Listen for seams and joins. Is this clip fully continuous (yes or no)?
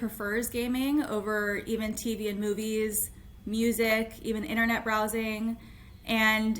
yes